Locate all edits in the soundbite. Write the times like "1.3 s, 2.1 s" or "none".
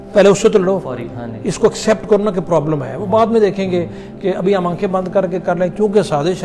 none